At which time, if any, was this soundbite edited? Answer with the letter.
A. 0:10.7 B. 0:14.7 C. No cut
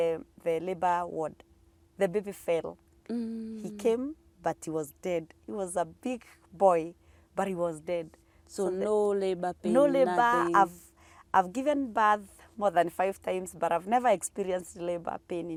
C